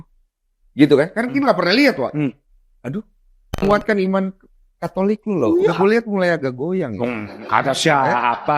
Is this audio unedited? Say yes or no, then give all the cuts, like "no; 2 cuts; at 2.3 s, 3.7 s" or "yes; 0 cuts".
no; 1 cut; at 3.6 s